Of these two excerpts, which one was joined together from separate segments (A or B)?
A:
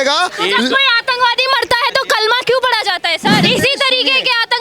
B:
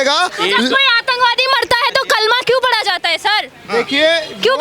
A